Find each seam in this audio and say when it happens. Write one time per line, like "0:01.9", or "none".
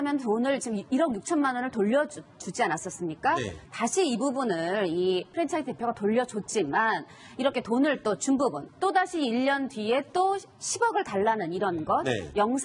0:11.8

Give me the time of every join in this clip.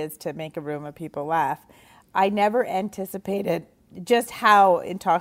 0:03.8

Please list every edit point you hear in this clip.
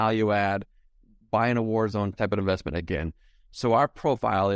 0:02.1

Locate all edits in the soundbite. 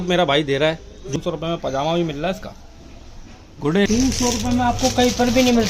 0:01.0
0:03.9

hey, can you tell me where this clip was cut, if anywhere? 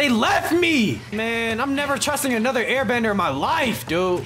0:01.0

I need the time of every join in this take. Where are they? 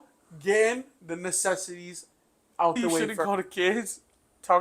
0:03.2

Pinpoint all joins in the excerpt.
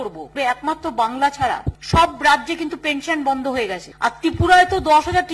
0:01.7
0:03.8

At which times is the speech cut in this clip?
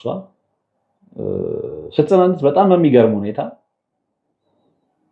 none

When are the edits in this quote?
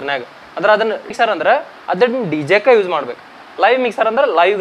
0:01.1

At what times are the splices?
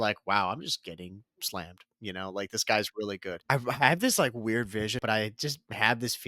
0:03.3
0:05.0

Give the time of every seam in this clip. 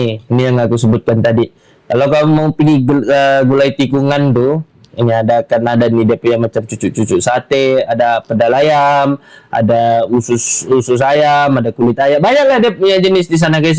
none

